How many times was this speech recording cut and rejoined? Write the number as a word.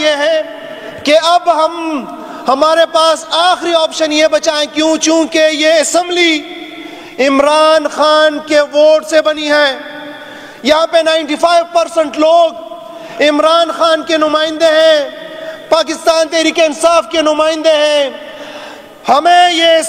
zero